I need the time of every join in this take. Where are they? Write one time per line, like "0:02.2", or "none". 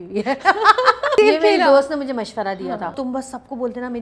0:01.1
0:02.9